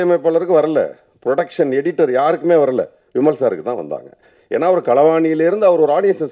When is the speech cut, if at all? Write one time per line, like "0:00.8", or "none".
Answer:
none